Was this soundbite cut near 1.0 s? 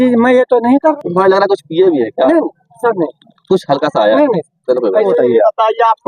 yes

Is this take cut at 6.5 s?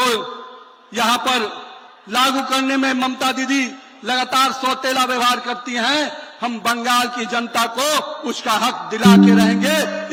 no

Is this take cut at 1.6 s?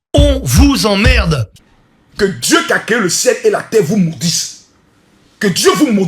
yes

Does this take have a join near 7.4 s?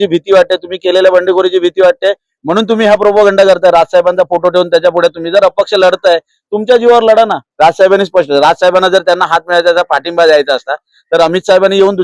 yes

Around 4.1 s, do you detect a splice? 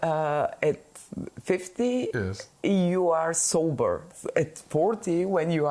yes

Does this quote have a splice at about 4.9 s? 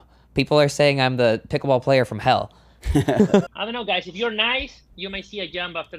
no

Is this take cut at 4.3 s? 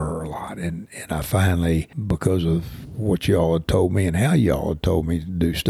no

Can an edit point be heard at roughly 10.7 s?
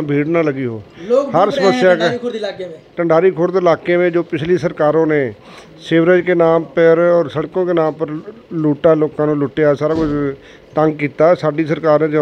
no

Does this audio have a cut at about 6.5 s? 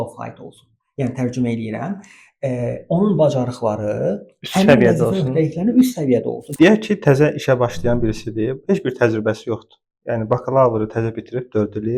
yes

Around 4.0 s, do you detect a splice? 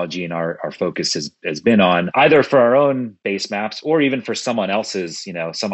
no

